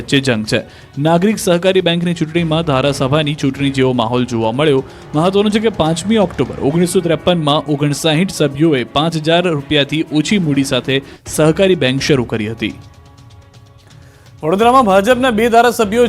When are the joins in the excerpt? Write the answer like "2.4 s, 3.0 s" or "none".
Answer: 8.7 s